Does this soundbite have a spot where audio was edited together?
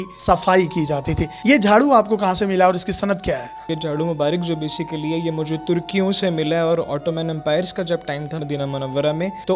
no; 0 cuts

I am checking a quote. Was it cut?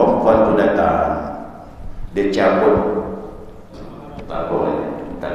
no; 0 cuts

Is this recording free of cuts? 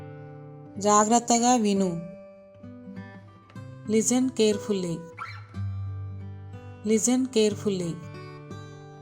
yes; 0 cuts

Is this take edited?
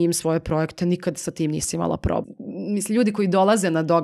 yes; 1 cut; at 2.2 s

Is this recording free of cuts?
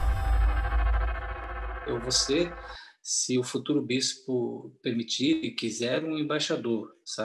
no; 1 cut; at 1.8 s

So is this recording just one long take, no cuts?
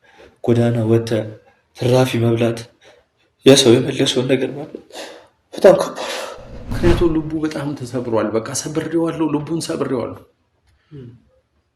no; 1 cut; at 6.8 s

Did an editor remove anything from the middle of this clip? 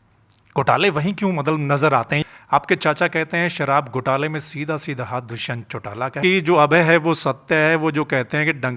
yes; 2 cuts; at 2.2 s, 6.1 s

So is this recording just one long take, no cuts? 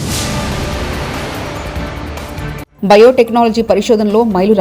no; 1 cut; at 2.7 s

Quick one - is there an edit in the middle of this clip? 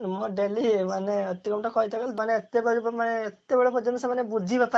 yes; 1 cut; at 2.1 s

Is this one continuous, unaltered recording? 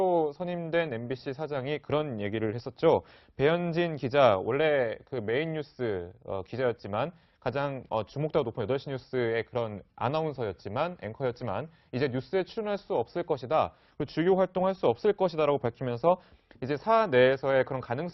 yes; 0 cuts

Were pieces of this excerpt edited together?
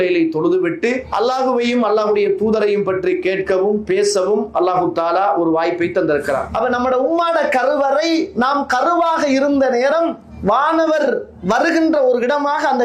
yes; 2 cuts; at 1.1 s, 6.5 s

